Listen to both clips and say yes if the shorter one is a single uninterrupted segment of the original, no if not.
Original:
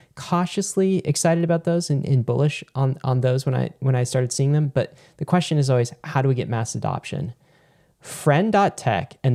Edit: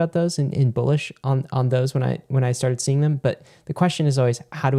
yes